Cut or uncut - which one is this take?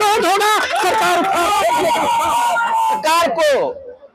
cut